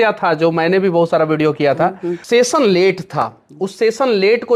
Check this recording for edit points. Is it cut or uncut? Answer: cut